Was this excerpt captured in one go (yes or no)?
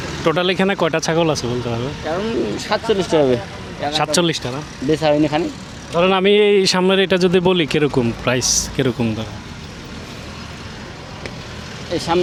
yes